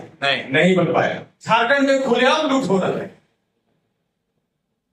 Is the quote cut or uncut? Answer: cut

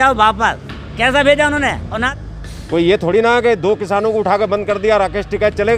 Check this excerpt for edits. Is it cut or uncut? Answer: cut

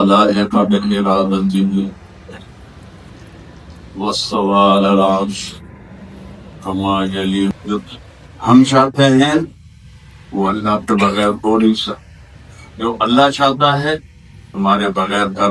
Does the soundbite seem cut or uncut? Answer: cut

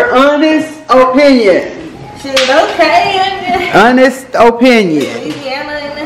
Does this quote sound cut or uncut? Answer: uncut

